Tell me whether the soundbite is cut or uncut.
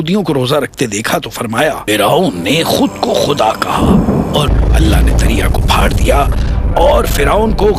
cut